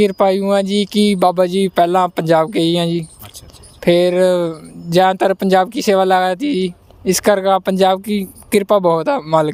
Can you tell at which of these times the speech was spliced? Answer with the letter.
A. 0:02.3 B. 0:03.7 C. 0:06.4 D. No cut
D